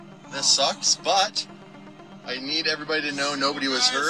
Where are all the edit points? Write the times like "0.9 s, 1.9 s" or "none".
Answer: none